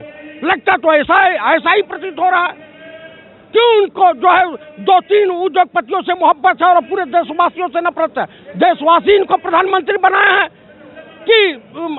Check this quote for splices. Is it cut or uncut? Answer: uncut